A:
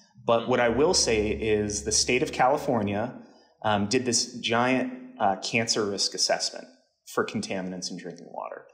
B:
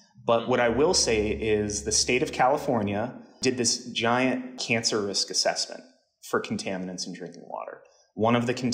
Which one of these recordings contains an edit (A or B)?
B